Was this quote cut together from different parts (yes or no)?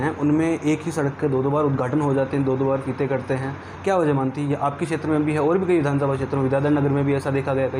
no